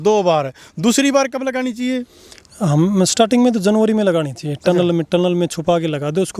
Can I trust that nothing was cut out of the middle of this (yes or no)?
yes